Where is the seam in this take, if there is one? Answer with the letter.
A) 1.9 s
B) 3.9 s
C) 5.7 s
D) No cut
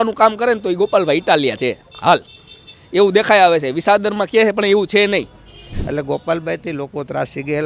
C